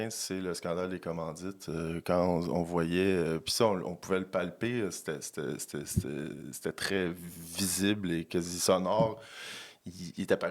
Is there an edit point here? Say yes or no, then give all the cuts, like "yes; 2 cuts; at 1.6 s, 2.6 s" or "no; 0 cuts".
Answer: no; 0 cuts